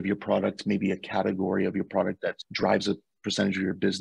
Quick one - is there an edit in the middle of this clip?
yes; 1 cut; at 2.4 s

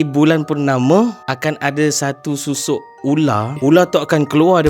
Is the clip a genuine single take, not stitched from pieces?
no; 2 cuts; at 1.3 s, 3.5 s

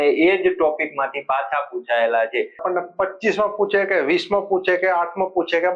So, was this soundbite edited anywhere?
yes; 1 cut; at 2.6 s

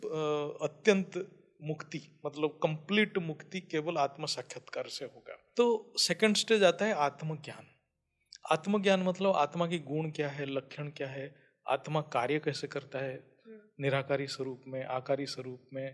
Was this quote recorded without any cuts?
no; 1 cut; at 5.4 s

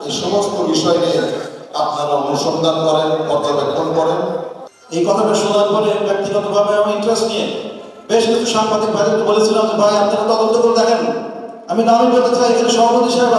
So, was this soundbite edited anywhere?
yes; 1 cut; at 4.5 s

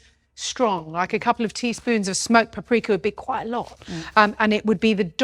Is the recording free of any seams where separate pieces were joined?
yes; 0 cuts

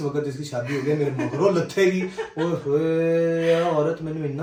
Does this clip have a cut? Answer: no; 0 cuts

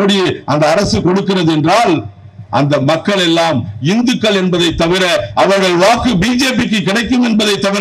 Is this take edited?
no; 0 cuts

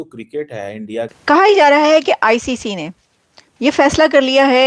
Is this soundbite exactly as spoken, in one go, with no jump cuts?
no; 1 cut; at 1.1 s

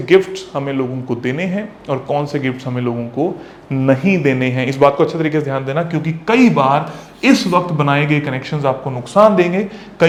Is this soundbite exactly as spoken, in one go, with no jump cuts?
yes; 0 cuts

